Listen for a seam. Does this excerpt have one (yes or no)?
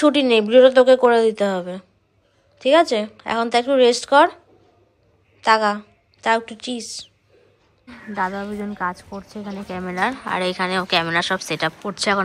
yes